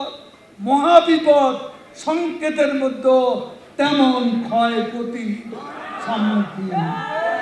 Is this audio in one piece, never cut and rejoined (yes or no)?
yes